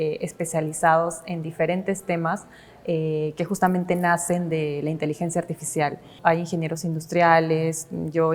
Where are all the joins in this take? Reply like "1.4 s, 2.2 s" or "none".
6.1 s